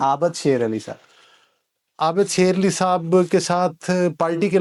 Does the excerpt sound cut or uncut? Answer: uncut